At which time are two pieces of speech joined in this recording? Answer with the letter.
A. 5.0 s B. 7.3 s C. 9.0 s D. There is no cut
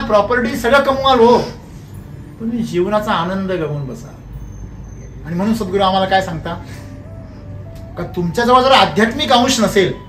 A